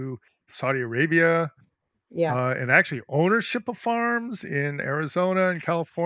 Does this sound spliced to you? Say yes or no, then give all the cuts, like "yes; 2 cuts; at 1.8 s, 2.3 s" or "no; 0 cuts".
no; 0 cuts